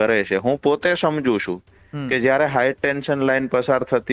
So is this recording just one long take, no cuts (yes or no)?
yes